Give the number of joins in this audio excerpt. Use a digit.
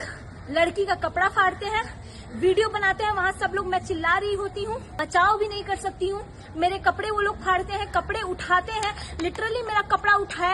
1